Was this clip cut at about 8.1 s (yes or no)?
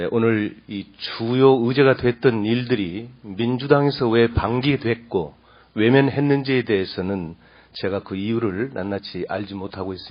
no